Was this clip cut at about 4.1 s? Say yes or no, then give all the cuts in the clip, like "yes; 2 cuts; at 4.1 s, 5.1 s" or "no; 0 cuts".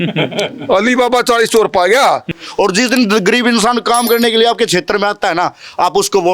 no; 1 cut; at 2.3 s